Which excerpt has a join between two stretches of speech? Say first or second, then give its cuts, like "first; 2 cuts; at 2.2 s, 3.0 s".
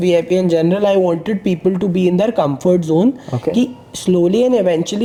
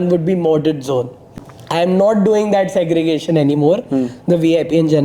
second; 1 cut; at 1.3 s